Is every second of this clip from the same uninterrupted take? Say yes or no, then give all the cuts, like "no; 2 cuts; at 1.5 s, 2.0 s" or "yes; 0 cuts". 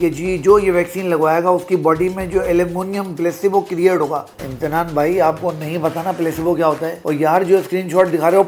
yes; 0 cuts